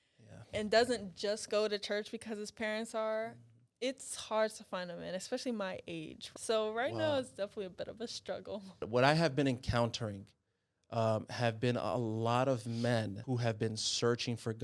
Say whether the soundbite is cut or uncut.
cut